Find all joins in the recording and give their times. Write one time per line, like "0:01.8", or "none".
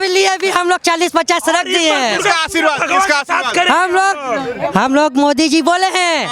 none